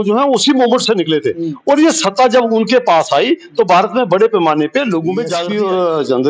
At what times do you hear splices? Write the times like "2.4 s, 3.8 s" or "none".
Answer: 5.4 s